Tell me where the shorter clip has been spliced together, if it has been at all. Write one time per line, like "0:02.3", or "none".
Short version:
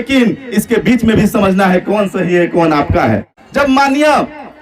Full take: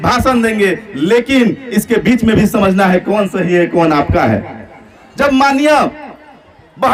0:03.4